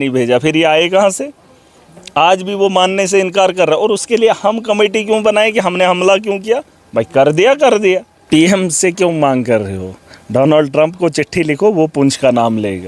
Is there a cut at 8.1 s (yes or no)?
yes